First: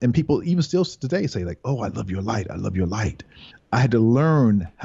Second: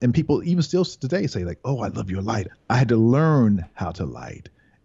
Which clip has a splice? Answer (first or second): second